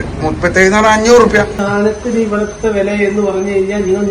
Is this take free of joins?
no; 1 cut; at 1.6 s

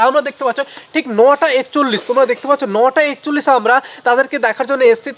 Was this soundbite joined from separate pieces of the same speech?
no; 0 cuts

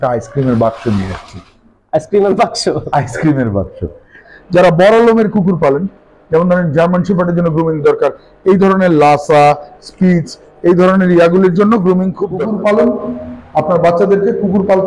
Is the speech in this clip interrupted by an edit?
yes; 2 cuts; at 4.2 s, 12.3 s

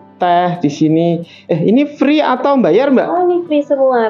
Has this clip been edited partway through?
no; 0 cuts

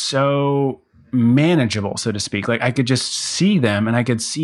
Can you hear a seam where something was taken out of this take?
yes; 1 cut; at 0.9 s

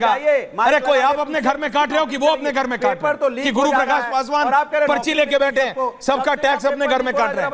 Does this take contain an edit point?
no; 0 cuts

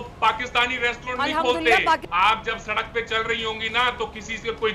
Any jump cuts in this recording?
yes; 1 cut; at 2.1 s

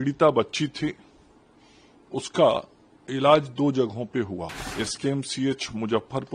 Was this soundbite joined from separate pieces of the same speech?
yes; 1 cut; at 4.6 s

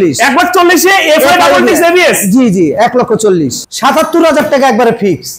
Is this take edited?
yes; 1 cut; at 3.6 s

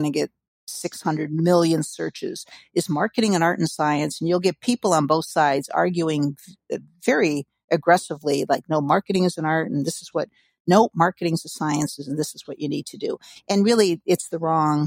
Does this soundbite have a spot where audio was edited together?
no; 0 cuts

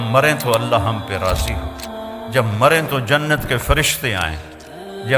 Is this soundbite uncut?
yes; 0 cuts

